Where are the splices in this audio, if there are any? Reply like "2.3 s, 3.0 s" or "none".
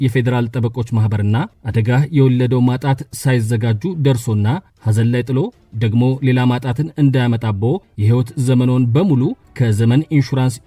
1.6 s, 4.8 s, 7.9 s, 9.5 s

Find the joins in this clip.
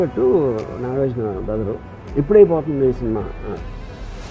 1.9 s

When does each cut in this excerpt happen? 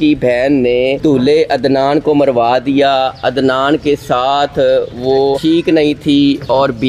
1.0 s, 5.4 s

